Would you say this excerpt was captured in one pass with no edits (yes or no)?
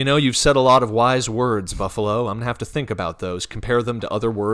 yes